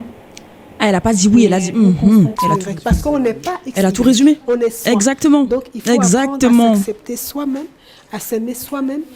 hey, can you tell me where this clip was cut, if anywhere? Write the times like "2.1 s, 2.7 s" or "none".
2.4 s